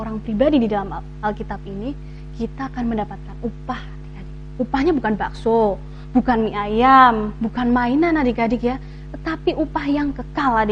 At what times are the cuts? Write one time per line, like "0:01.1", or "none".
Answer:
none